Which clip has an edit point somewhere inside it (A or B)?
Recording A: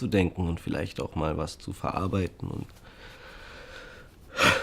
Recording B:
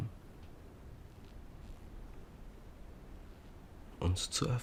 A